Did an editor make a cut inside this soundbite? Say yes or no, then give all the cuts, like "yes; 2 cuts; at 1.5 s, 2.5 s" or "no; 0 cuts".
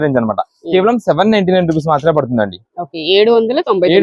no; 0 cuts